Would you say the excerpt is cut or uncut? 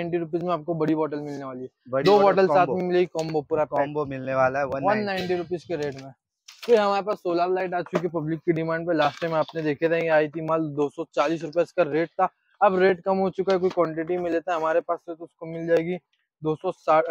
uncut